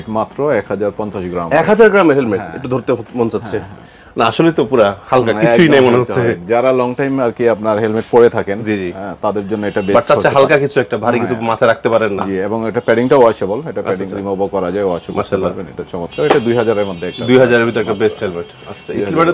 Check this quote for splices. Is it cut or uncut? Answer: uncut